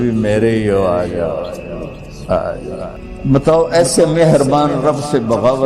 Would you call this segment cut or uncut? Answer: uncut